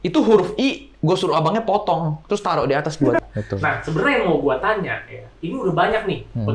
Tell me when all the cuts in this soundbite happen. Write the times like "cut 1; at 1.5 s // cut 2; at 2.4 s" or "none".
cut 1; at 3.2 s